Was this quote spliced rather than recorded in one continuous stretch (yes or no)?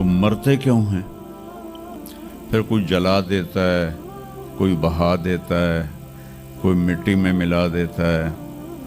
no